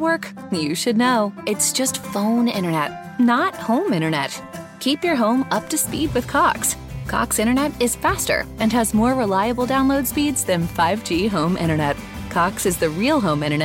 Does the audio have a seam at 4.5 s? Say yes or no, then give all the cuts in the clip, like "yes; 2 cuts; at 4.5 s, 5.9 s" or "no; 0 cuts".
no; 0 cuts